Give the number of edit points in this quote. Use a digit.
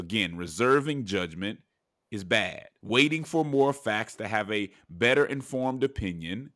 1